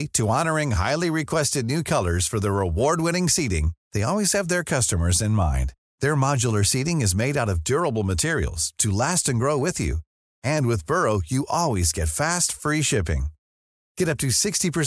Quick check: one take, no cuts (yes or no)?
yes